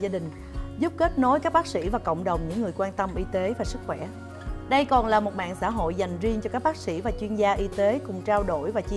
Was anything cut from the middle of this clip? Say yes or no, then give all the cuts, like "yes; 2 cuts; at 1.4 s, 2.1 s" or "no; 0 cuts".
no; 0 cuts